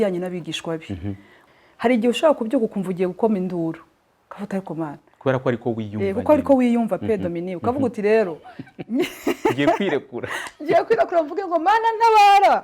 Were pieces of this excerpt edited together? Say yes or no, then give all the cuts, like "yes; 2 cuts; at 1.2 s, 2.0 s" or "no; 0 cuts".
yes; 1 cut; at 1.3 s